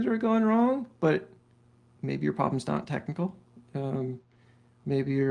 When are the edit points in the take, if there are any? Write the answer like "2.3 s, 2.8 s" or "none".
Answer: none